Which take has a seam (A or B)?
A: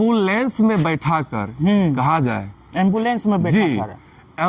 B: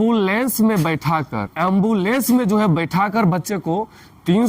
B